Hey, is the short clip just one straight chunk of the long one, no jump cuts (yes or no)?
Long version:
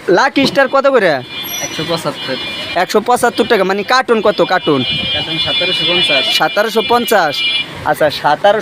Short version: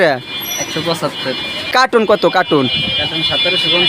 no